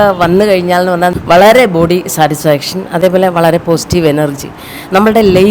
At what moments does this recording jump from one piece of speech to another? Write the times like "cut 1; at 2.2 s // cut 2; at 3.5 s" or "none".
cut 1; at 1.1 s